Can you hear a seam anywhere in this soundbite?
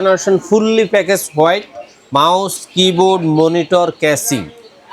no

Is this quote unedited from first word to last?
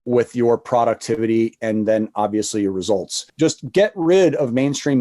no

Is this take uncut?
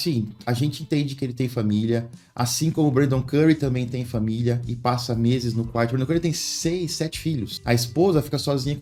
yes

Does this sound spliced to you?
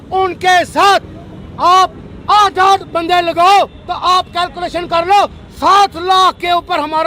no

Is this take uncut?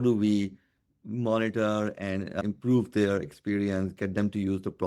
no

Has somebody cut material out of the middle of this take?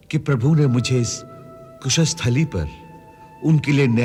no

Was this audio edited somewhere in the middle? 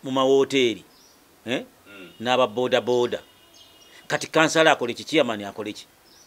no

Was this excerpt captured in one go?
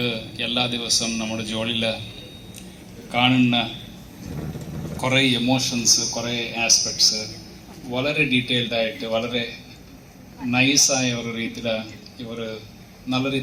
yes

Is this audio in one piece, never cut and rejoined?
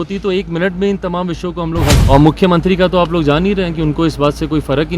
no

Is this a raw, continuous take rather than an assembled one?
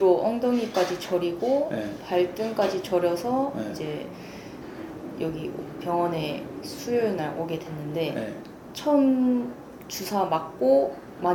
yes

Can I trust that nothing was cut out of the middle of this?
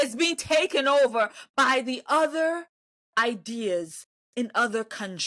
yes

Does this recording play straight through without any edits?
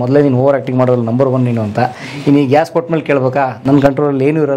yes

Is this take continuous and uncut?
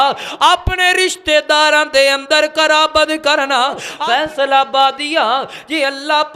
no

